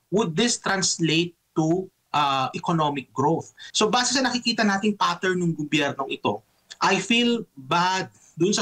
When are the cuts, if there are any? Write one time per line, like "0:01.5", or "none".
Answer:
0:03.6